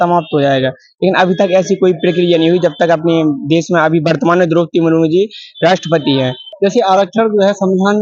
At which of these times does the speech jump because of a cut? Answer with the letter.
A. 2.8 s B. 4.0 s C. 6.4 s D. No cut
C